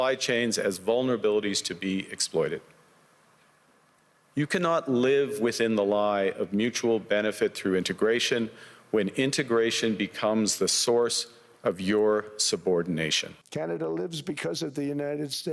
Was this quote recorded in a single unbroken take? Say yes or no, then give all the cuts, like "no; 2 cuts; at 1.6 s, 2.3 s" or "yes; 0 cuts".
no; 1 cut; at 13.3 s